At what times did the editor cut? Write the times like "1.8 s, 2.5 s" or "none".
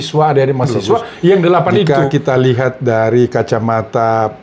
1.9 s